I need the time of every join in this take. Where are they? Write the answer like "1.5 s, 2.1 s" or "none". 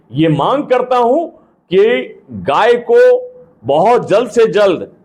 none